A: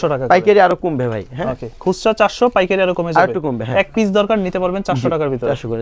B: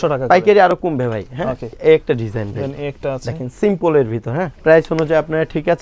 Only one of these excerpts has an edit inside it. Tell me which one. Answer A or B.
B